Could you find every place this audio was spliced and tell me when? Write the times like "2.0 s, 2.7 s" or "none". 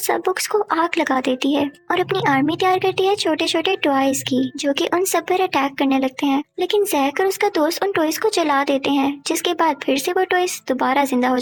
none

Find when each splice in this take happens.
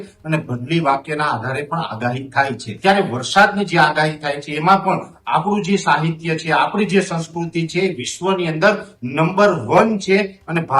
2.7 s

